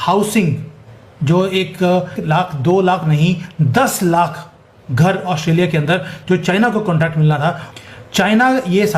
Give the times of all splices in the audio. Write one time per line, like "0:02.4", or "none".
0:02.2